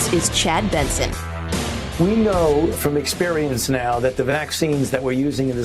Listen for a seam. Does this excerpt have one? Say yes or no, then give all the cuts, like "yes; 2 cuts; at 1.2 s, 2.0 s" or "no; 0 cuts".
yes; 1 cut; at 1.9 s